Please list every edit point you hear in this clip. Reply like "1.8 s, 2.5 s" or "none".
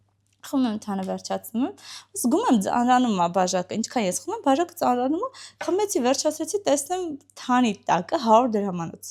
none